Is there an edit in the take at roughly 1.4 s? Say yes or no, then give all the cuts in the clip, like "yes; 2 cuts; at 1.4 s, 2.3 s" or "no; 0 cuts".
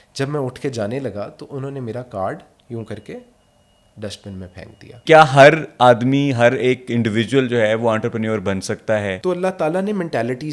no; 2 cuts; at 5.0 s, 9.2 s